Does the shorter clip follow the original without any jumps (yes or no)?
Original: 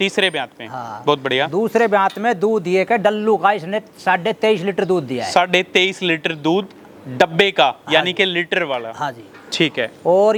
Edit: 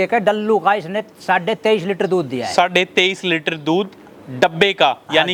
yes